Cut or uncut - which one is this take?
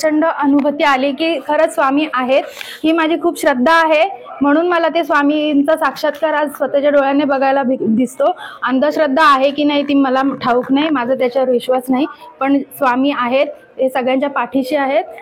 uncut